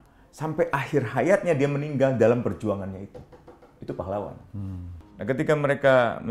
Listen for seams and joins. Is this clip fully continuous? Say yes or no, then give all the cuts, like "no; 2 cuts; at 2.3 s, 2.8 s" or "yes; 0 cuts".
no; 1 cut; at 5.2 s